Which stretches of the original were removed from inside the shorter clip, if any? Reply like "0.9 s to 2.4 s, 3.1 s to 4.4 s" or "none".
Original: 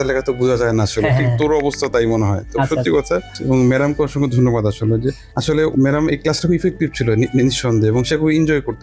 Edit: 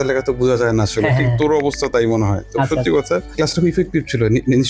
3.3 s to 6.2 s